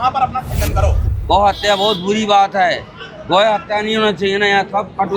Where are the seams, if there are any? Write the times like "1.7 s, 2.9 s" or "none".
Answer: 1.0 s